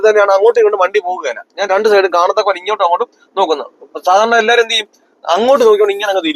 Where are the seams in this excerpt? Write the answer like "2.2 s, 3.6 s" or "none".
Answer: none